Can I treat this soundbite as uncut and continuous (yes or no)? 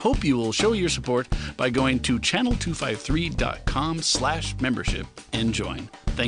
yes